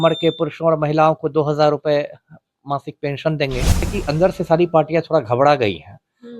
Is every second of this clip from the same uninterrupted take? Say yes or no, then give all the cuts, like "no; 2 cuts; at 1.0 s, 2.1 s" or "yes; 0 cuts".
no; 1 cut; at 3.8 s